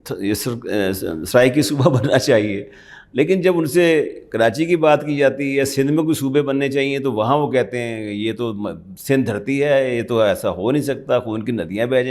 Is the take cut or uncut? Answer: uncut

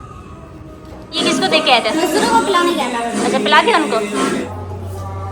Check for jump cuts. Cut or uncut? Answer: cut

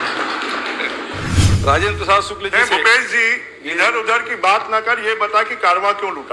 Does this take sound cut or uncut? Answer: cut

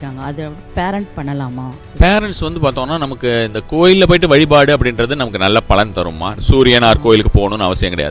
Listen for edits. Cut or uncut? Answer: cut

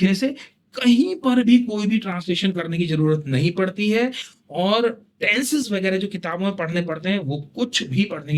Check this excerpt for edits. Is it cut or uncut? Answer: uncut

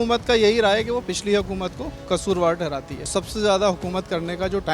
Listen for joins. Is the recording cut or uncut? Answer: cut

